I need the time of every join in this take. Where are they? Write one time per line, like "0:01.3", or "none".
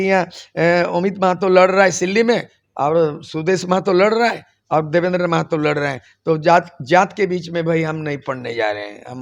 none